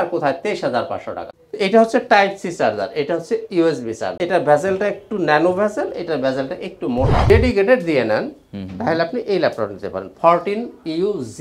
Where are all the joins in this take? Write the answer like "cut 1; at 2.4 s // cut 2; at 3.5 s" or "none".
cut 1; at 4.1 s // cut 2; at 7.2 s